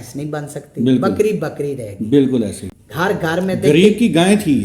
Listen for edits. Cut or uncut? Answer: cut